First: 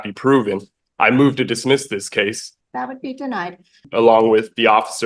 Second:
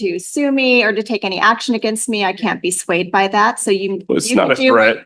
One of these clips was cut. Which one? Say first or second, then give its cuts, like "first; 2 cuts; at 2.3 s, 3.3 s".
first; 2 cuts; at 2.5 s, 3.8 s